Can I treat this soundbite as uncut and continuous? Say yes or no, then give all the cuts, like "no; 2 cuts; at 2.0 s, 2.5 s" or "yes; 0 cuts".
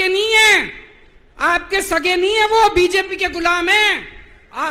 yes; 0 cuts